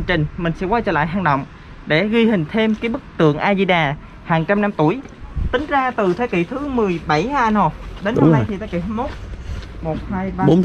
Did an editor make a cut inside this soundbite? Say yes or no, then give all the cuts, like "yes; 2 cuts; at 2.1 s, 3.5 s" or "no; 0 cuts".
no; 0 cuts